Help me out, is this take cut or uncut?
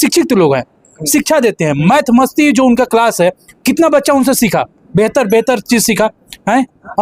uncut